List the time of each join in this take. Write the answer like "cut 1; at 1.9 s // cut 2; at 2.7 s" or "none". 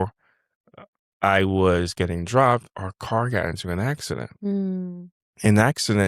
none